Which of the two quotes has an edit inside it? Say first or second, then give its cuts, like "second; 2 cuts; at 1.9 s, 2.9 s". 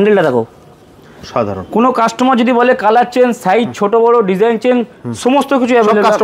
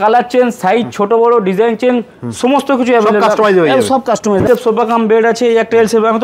second; 1 cut; at 4.5 s